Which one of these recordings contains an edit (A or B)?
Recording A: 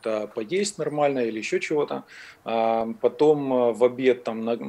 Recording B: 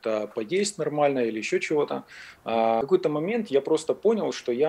B